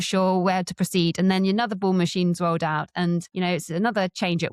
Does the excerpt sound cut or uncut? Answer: cut